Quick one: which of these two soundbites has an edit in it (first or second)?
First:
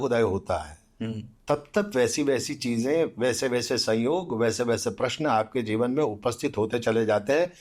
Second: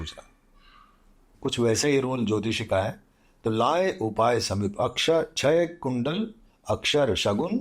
second